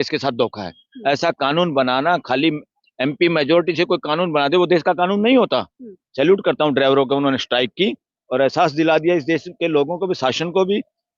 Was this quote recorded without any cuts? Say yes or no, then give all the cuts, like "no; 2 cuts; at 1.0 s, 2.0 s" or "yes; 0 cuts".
no; 1 cut; at 6.0 s